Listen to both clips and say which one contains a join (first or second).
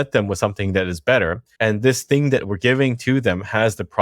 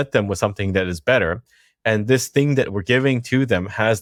first